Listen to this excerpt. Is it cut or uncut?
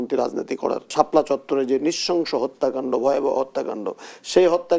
cut